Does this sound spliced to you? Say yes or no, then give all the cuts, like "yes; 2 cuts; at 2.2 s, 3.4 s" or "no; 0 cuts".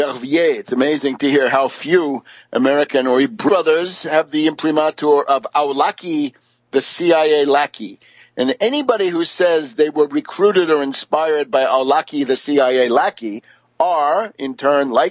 no; 0 cuts